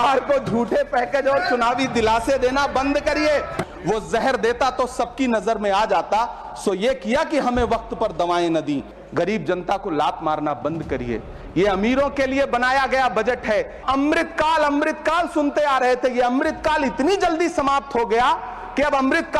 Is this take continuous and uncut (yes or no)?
no